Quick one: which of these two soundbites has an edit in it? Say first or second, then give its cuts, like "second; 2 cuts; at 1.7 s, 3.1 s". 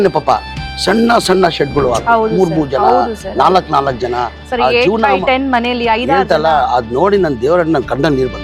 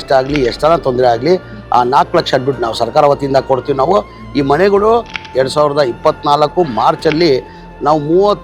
second; 1 cut; at 5.2 s